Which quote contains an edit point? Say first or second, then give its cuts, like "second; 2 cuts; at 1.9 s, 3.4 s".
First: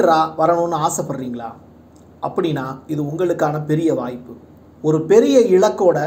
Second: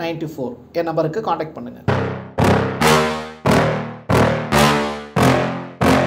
second; 1 cut; at 1.9 s